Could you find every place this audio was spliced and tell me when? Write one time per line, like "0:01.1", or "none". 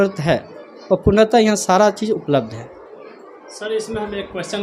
none